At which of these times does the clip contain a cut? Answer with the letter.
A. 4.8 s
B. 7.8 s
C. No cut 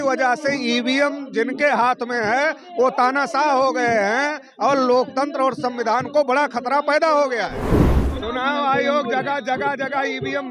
B